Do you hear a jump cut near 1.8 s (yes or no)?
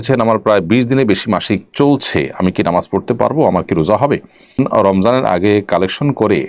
no